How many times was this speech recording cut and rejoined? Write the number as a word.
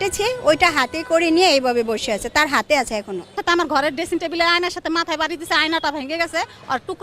one